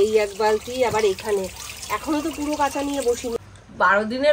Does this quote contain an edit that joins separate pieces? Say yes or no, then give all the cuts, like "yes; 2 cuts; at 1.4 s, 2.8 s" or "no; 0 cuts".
yes; 1 cut; at 3.3 s